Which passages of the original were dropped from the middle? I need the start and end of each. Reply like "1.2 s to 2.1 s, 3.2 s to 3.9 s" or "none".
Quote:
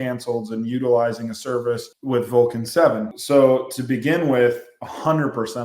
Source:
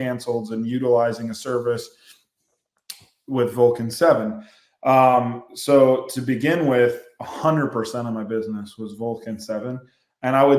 1.9 s to 3.2 s, 4.4 s to 5.5 s